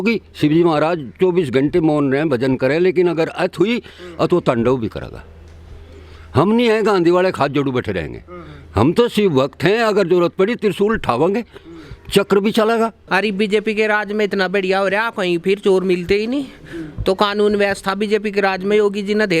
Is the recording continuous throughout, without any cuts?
no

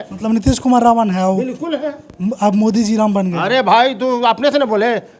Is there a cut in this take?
no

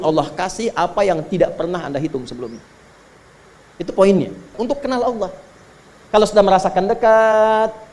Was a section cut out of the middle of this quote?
yes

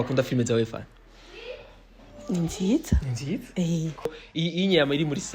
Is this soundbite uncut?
no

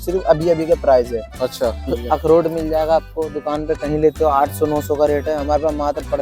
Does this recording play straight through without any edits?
no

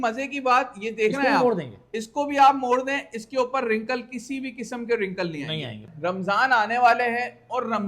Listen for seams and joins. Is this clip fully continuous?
no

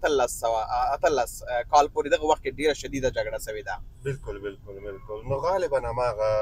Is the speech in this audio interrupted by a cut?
no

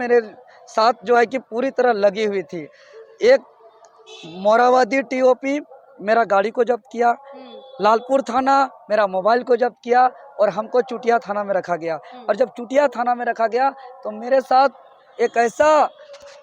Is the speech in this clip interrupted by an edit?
no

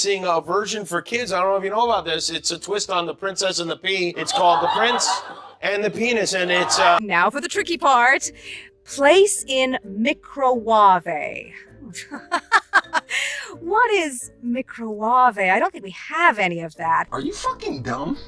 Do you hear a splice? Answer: yes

